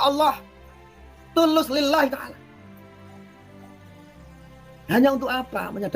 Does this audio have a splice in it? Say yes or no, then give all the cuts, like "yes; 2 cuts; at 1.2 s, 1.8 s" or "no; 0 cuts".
no; 0 cuts